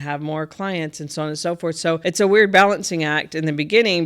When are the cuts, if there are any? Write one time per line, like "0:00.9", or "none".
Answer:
0:02.0